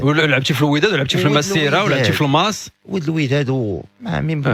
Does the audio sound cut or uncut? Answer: uncut